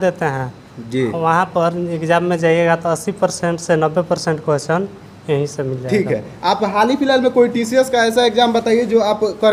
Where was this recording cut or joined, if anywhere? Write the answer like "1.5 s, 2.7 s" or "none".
none